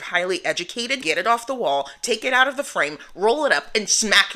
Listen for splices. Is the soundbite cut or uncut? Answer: cut